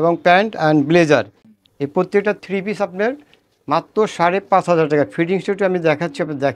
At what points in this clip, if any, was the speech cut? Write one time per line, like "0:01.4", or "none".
none